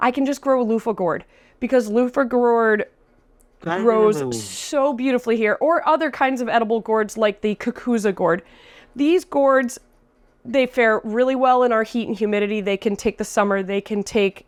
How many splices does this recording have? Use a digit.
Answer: 0